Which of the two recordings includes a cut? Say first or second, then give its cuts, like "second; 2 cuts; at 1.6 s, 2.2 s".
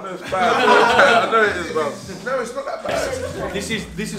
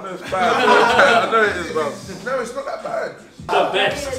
first; 1 cut; at 3.1 s